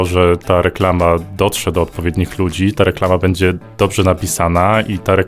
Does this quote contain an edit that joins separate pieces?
no; 0 cuts

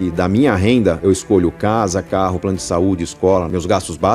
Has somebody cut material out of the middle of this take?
no; 0 cuts

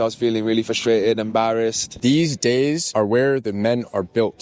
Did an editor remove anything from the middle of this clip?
yes; 2 cuts; at 1.9 s, 2.8 s

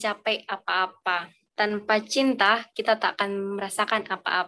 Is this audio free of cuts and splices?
no; 1 cut; at 1.4 s

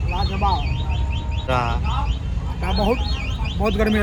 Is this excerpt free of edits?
yes; 0 cuts

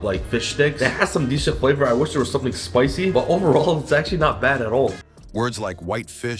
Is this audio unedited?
yes; 0 cuts

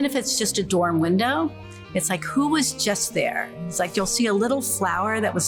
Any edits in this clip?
no; 0 cuts

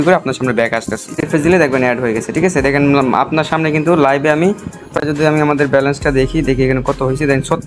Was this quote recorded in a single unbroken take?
no; 2 cuts; at 1.2 s, 5.0 s

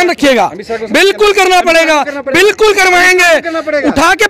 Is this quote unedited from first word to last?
yes; 0 cuts

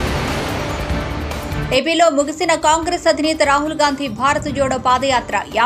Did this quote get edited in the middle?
no; 0 cuts

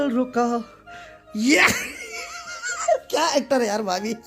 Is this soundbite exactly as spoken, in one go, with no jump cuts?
yes; 0 cuts

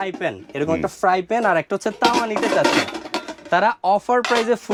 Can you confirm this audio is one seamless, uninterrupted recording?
yes; 0 cuts

